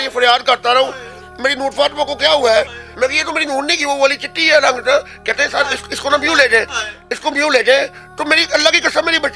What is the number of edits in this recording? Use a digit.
1